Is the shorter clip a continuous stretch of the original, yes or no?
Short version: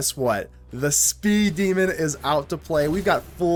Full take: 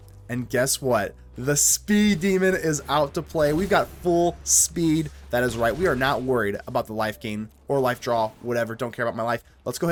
yes